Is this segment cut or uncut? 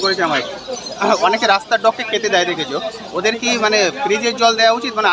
uncut